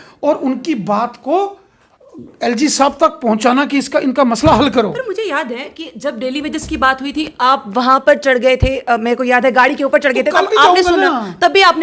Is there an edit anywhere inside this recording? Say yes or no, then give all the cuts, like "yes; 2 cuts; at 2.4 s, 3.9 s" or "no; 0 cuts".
no; 0 cuts